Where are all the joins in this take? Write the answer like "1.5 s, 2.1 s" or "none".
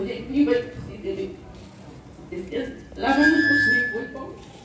none